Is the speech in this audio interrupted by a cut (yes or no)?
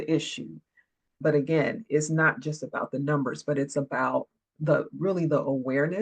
yes